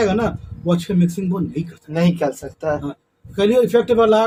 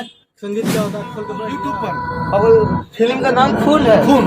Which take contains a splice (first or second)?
second